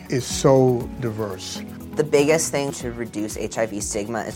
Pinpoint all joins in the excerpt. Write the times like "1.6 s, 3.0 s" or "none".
none

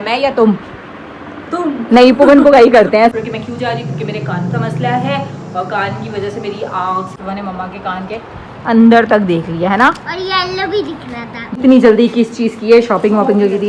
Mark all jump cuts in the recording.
3.1 s, 7.1 s, 11.6 s

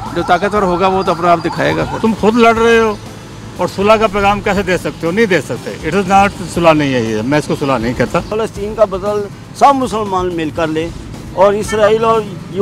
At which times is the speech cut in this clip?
1.9 s, 8.3 s

